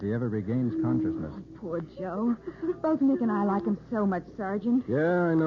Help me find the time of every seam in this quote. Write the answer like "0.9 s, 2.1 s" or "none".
2.1 s